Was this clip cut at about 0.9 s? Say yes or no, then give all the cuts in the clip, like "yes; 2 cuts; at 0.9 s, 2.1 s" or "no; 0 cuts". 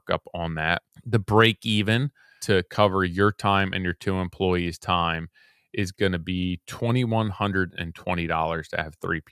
yes; 2 cuts; at 0.9 s, 2.4 s